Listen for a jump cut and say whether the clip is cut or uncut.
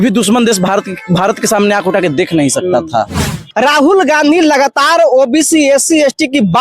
cut